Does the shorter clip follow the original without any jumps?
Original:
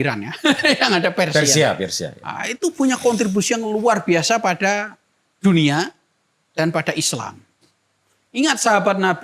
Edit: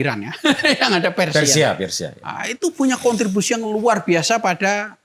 yes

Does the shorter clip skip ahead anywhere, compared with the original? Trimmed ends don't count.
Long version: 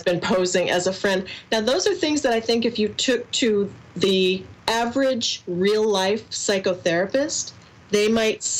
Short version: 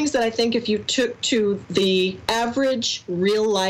yes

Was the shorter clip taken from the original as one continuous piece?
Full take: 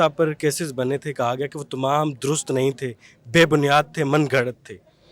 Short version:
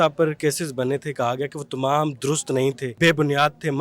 no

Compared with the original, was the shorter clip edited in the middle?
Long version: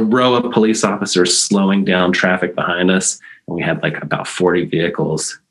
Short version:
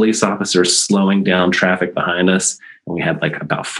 no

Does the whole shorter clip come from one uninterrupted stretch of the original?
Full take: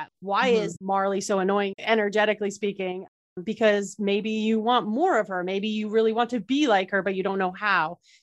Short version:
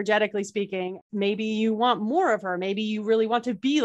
no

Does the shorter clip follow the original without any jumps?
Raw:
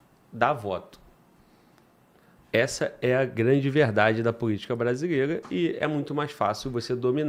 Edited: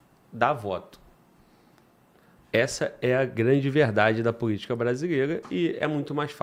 yes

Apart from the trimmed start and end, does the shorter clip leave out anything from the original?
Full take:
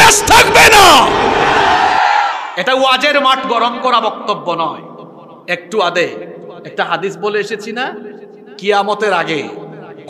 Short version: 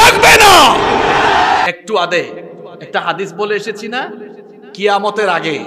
yes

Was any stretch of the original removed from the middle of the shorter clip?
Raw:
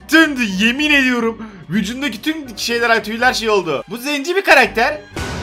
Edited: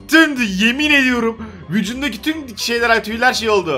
no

